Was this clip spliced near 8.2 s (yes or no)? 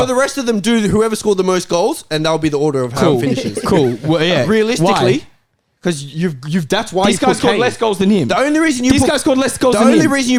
no